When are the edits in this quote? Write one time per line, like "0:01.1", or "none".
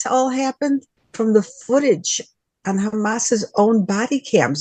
0:01.0